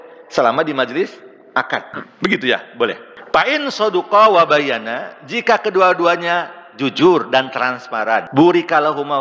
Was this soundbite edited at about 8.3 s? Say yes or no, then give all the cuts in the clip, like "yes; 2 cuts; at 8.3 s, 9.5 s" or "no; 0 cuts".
yes; 3 cuts; at 2.0 s, 3.1 s, 8.3 s